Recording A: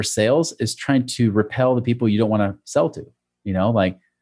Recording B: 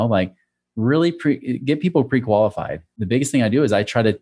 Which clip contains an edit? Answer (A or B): B